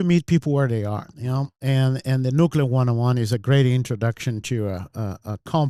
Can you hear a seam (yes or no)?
no